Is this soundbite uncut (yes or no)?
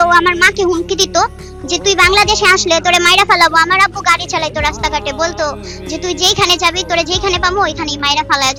yes